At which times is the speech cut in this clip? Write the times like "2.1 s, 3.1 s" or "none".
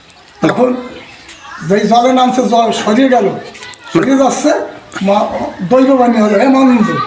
none